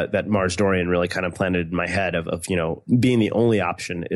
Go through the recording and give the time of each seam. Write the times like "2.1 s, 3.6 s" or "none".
2.8 s